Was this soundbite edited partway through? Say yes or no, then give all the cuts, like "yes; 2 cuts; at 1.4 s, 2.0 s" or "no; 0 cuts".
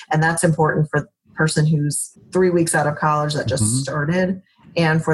yes; 1 cut; at 2.1 s